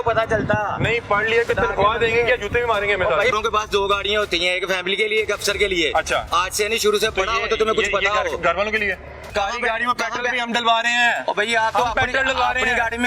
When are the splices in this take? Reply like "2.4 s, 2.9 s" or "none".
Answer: 3.3 s, 9.3 s